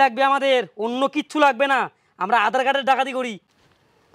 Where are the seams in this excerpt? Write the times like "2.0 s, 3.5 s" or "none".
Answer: none